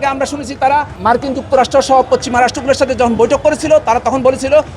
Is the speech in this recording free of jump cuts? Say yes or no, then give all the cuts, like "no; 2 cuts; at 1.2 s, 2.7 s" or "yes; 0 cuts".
no; 1 cut; at 0.9 s